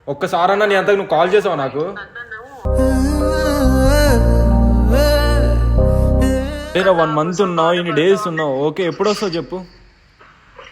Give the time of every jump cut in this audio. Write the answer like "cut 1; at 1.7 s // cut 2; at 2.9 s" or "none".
cut 1; at 6.7 s